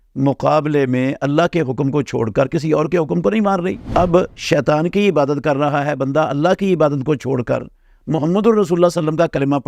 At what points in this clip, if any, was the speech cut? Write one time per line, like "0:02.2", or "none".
0:03.8

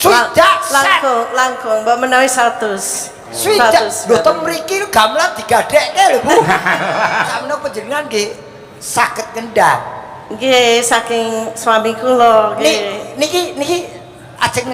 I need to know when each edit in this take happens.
0:07.3

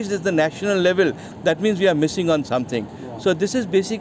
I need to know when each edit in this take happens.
none

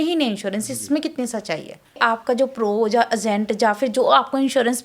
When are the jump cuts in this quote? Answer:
0:02.0

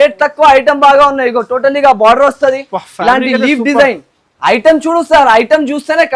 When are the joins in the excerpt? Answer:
none

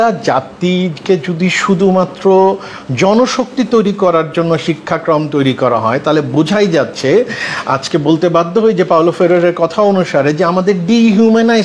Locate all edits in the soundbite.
none

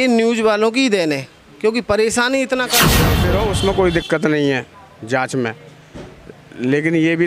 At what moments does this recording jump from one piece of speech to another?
0:03.1

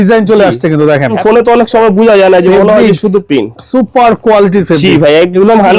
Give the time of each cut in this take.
0:01.2

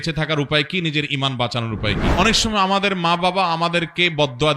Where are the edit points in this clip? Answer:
0:02.1

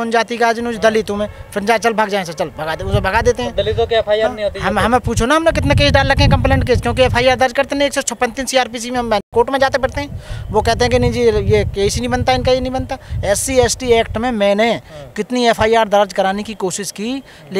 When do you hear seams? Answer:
none

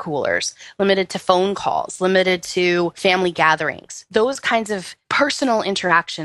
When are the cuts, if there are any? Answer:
0:03.0
0:05.0

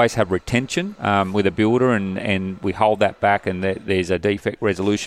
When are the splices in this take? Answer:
0:00.9

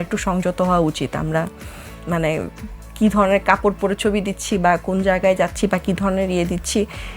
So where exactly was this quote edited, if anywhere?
none

